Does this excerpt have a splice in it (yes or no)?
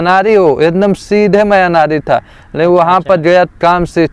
no